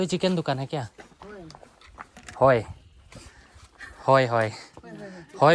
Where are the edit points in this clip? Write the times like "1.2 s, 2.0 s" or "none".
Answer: none